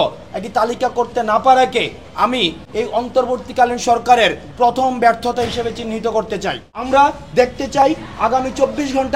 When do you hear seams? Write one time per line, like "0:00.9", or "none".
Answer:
0:06.7